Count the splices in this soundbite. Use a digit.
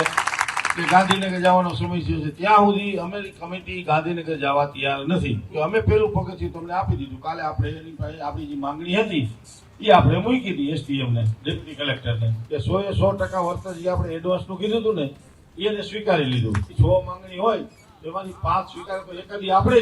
3